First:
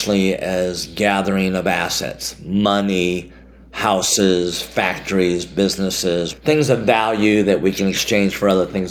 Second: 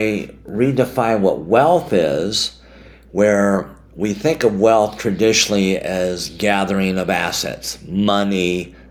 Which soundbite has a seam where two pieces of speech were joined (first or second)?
first